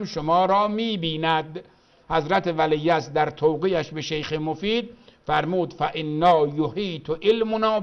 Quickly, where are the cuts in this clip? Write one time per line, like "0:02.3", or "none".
0:01.9